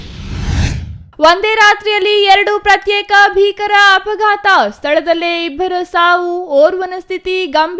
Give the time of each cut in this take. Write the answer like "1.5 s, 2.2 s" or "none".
1.0 s